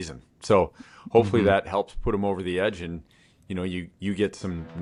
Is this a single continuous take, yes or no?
yes